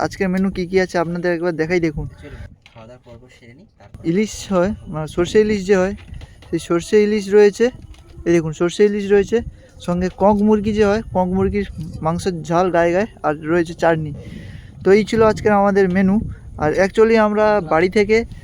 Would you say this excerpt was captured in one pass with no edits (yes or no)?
no